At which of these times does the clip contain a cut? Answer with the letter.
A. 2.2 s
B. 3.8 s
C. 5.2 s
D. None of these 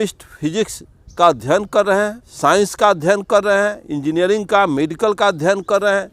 A